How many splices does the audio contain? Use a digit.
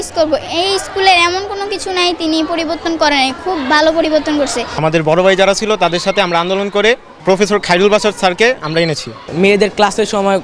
3